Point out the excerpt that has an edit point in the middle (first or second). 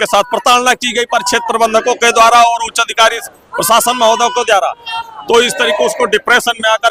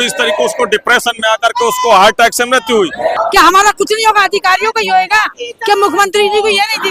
second